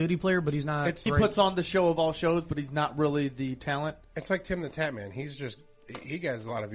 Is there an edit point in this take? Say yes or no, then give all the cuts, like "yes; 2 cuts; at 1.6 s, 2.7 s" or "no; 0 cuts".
yes; 1 cut; at 1.0 s